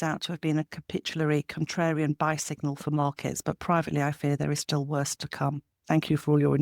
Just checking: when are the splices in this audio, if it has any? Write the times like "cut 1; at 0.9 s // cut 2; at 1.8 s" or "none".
cut 1; at 5.7 s